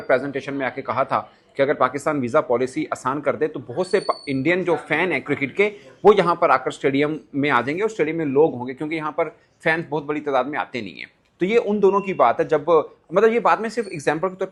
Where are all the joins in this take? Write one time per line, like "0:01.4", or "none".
none